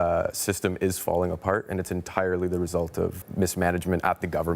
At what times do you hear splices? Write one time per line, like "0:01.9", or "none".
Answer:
0:03.2